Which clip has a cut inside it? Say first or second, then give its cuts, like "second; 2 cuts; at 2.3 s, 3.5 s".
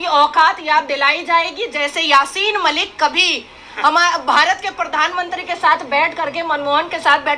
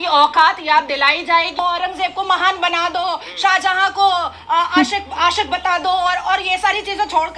second; 1 cut; at 1.6 s